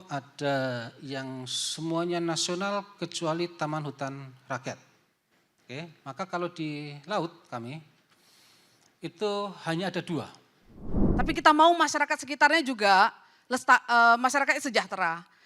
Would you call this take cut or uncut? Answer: cut